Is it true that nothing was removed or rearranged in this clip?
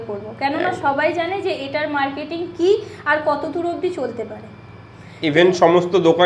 yes; 0 cuts

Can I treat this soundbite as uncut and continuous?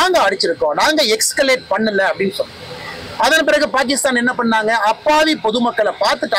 yes; 0 cuts

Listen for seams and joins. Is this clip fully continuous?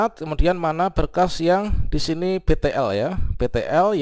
yes; 0 cuts

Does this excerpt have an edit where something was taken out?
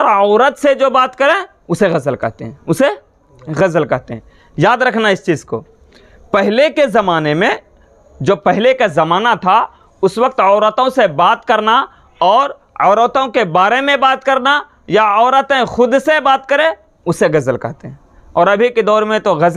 no; 0 cuts

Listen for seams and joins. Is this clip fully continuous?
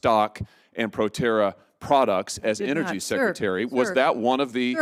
yes; 0 cuts

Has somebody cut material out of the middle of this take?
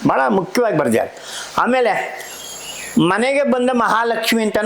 no; 0 cuts

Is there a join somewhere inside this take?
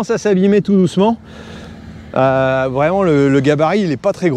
no; 0 cuts

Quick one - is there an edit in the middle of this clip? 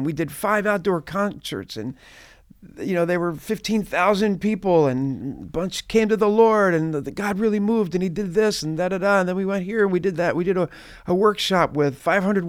no; 0 cuts

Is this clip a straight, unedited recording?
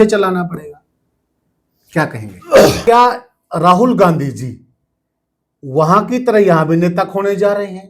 no; 1 cut; at 2.8 s

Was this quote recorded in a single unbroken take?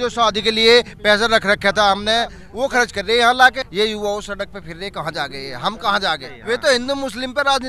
no; 3 cuts; at 2.4 s, 3.6 s, 6.3 s

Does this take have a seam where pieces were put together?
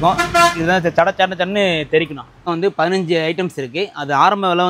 yes; 1 cut; at 2.4 s

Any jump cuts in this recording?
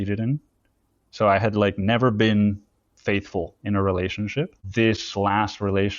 yes; 1 cut; at 4.6 s

